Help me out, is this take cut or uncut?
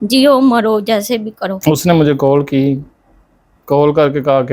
cut